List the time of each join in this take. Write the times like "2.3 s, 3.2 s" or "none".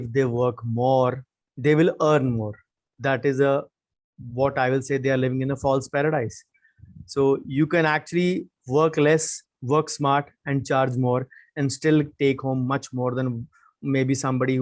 none